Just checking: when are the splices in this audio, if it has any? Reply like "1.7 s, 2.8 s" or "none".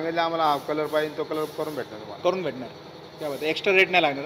none